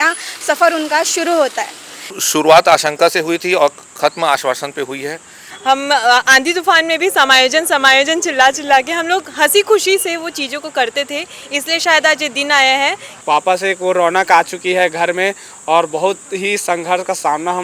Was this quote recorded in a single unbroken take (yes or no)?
no